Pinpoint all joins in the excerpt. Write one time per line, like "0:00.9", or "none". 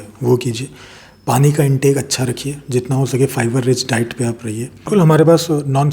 0:04.9

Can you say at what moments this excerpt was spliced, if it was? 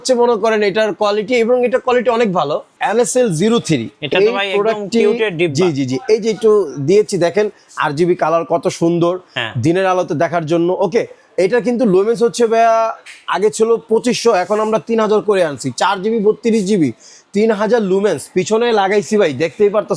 0:02.8

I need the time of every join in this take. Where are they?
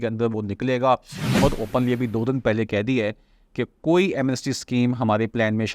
0:01.3

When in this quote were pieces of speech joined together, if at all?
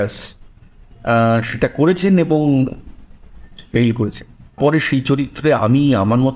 0:04.6

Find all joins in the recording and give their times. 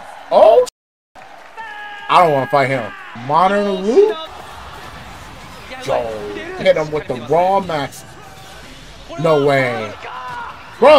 0:04.3

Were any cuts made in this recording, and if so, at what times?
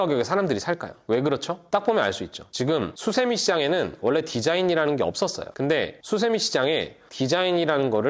0:02.9
0:05.8

